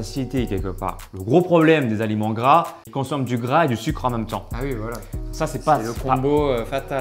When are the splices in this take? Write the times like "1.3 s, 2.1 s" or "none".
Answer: 1.1 s, 2.8 s